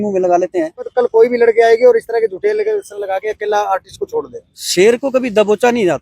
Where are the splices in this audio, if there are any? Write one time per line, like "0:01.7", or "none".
0:00.9
0:04.6